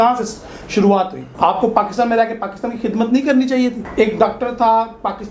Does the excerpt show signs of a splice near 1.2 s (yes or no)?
yes